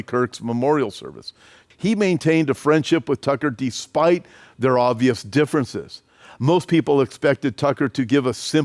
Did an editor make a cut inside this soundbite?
yes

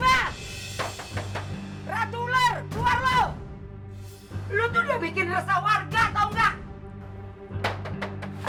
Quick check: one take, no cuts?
yes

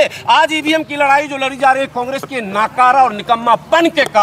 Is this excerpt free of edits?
yes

